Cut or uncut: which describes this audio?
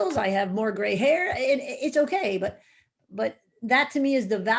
uncut